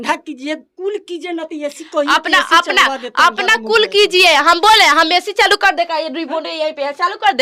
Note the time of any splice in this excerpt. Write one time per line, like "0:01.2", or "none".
none